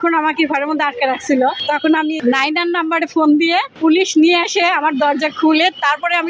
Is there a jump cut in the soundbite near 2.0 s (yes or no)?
yes